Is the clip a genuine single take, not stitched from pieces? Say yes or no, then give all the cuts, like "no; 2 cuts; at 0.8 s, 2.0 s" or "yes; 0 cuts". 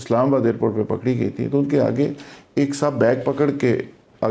yes; 0 cuts